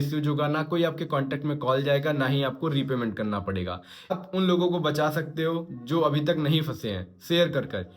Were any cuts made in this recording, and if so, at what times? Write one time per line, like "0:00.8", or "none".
0:04.1